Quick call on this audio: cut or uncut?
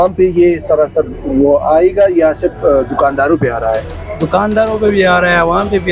uncut